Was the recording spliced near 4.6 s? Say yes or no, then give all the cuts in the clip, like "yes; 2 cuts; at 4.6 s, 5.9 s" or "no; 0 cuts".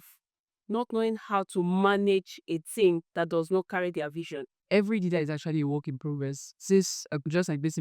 yes; 1 cut; at 4.6 s